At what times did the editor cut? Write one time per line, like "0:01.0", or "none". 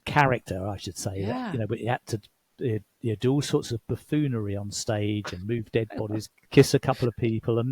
0:06.4